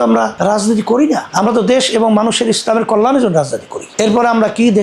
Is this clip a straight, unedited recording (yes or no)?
yes